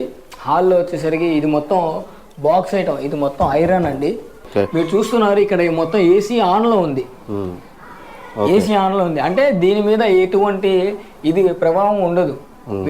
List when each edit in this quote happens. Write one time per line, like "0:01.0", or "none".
0:04.5